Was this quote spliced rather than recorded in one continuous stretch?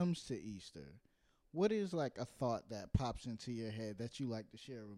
no; 0 cuts

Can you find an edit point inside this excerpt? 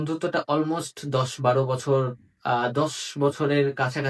no; 0 cuts

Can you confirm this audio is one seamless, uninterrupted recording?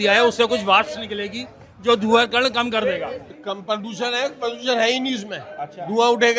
no; 1 cut; at 3.3 s

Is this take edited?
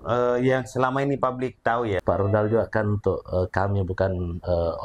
yes; 1 cut; at 2.0 s

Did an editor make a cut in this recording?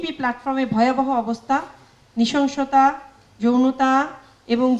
no; 0 cuts

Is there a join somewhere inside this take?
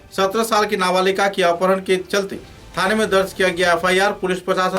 no; 0 cuts

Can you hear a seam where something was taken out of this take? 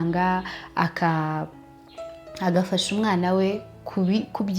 no; 0 cuts

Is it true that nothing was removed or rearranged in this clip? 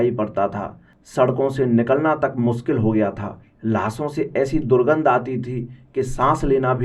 yes; 0 cuts

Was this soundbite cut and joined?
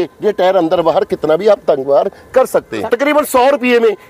yes; 1 cut; at 2.8 s

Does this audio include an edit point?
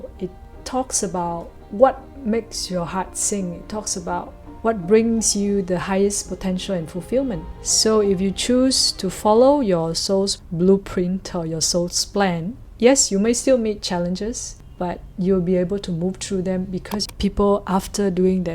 yes; 2 cuts; at 7.5 s, 17.0 s

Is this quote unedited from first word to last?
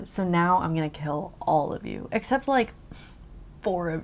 yes; 0 cuts

